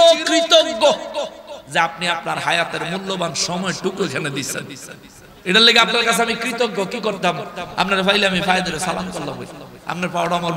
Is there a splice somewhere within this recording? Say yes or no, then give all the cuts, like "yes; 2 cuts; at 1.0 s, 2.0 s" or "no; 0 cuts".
no; 0 cuts